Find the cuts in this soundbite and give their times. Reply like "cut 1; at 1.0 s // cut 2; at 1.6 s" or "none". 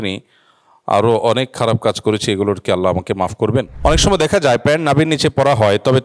cut 1; at 3.7 s